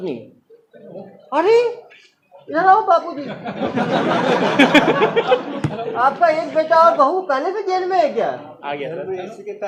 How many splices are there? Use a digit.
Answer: 0